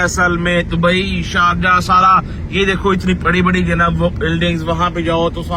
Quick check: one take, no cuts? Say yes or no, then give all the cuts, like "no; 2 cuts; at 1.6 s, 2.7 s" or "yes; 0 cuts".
yes; 0 cuts